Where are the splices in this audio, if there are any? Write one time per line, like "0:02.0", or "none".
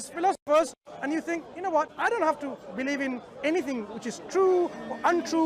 0:01.9